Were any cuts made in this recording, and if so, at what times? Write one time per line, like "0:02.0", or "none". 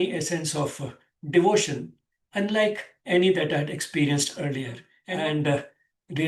0:04.9